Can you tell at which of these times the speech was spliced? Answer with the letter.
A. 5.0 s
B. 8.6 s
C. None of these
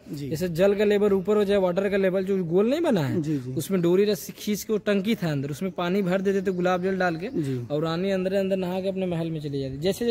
C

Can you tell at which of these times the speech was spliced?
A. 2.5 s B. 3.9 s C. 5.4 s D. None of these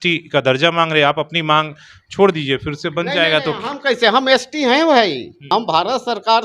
C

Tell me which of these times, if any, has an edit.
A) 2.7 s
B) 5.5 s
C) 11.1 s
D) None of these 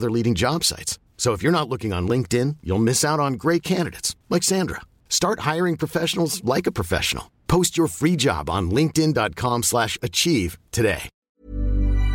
C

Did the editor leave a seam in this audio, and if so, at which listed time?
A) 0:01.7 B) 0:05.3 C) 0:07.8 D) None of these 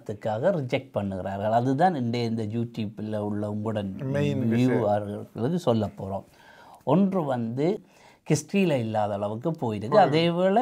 C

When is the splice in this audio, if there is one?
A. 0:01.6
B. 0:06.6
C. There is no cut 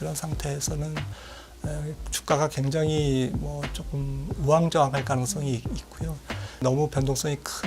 B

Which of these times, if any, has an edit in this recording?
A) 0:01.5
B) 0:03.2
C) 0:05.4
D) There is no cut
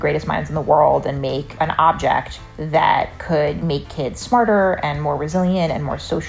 A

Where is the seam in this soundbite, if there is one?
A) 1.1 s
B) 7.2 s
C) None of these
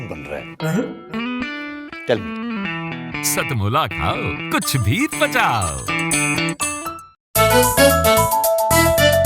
B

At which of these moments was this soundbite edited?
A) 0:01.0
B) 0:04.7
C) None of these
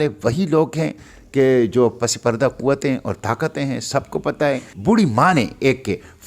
B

